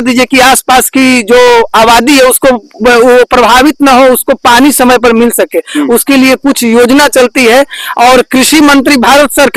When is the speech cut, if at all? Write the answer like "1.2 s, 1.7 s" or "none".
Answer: none